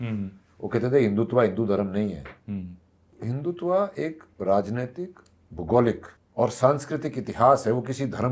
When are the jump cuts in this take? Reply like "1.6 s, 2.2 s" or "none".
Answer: 3.1 s, 6.2 s